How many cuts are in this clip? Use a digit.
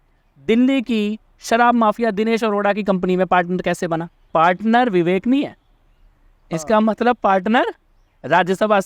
1